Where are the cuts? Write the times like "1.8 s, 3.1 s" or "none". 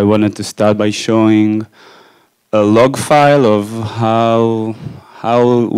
none